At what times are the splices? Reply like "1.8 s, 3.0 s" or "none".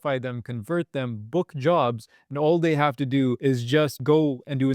3.6 s